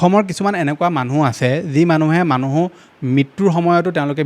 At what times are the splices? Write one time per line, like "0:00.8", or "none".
none